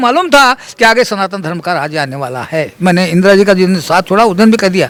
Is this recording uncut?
yes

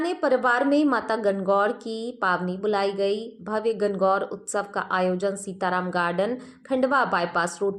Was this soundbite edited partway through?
no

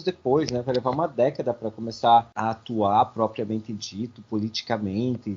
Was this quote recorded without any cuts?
yes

